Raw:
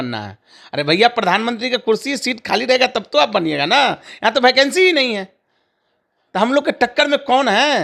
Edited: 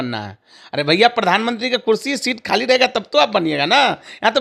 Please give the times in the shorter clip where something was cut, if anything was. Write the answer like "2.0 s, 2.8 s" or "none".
none